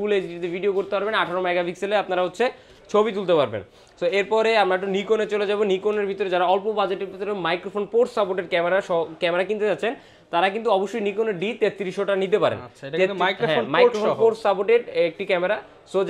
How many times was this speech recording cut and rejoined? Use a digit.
0